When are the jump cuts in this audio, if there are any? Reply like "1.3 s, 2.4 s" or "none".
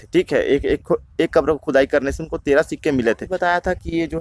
3.3 s

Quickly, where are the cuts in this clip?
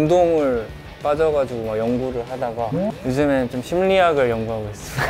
2.9 s

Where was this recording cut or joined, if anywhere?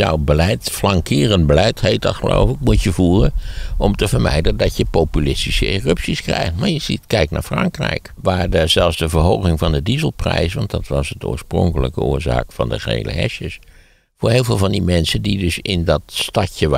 8.2 s

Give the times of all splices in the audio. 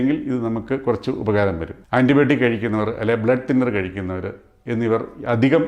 1.7 s

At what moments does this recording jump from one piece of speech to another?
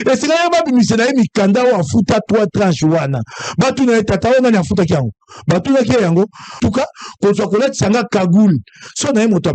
6.6 s

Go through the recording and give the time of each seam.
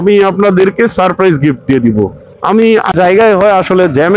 2.9 s

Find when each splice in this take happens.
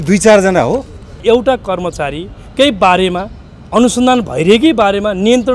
1.2 s

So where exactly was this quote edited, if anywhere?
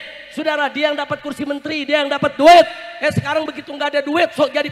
none

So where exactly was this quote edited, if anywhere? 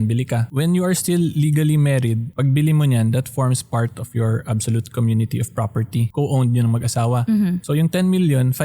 2.3 s, 6.1 s, 7.6 s

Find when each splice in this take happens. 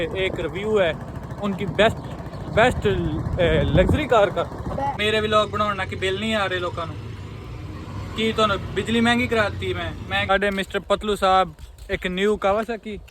5.0 s, 10.3 s

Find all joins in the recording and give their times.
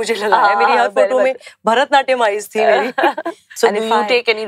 3.4 s

